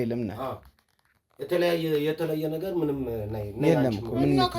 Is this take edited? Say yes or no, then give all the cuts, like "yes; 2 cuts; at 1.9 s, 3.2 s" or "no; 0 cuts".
no; 0 cuts